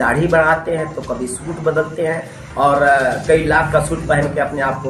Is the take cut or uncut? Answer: uncut